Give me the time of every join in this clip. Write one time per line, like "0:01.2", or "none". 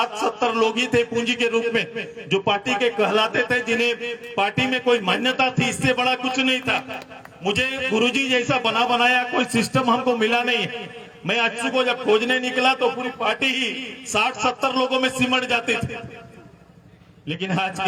none